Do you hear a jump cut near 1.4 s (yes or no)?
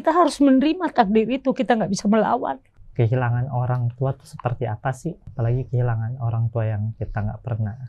no